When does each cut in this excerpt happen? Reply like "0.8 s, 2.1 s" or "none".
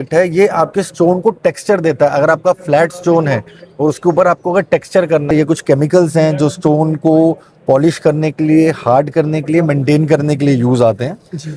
5.3 s